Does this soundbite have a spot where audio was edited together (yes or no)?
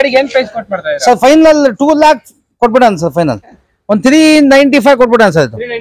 yes